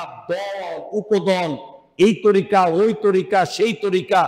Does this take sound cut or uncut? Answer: uncut